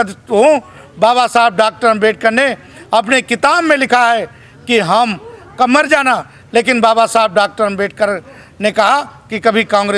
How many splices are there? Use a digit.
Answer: 0